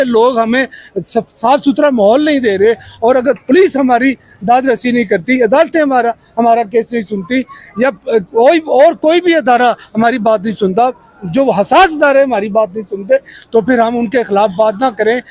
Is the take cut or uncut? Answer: uncut